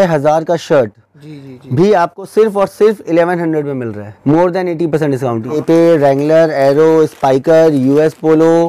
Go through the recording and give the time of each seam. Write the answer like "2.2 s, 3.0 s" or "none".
4.0 s, 5.6 s